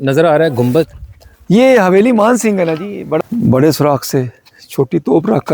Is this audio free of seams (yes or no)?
no